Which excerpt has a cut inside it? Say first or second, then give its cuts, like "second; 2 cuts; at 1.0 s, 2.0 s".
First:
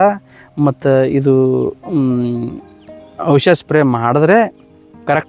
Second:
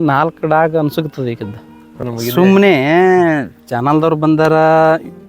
second; 1 cut; at 2.0 s